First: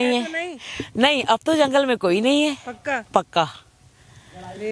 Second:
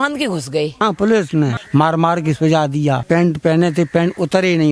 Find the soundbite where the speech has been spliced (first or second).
second